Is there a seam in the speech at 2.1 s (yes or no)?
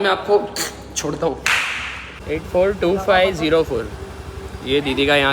yes